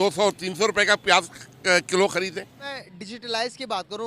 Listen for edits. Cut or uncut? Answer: cut